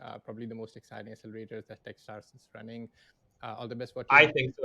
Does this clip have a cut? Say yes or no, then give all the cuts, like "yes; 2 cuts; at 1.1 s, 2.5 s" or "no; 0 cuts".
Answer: no; 0 cuts